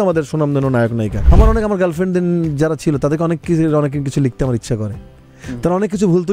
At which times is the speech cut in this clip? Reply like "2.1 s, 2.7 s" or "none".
1.2 s